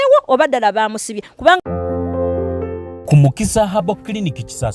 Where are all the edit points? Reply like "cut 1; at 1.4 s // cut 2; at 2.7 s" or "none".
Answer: cut 1; at 1.6 s